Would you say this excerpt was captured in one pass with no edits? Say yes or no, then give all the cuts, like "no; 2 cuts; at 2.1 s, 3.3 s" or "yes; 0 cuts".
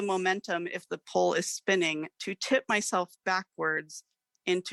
yes; 0 cuts